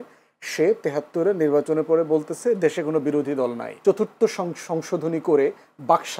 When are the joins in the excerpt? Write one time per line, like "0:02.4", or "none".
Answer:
0:03.7